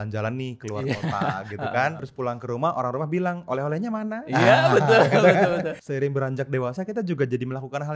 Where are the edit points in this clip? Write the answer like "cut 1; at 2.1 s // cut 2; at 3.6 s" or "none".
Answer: cut 1; at 2.0 s // cut 2; at 5.8 s